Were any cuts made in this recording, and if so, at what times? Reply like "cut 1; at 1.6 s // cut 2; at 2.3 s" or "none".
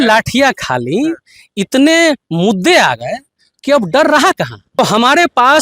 cut 1; at 4.6 s